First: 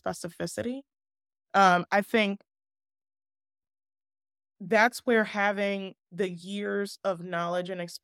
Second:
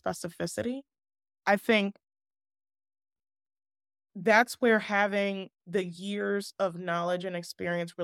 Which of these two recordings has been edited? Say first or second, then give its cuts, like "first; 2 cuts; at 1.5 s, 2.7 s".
second; 1 cut; at 1.4 s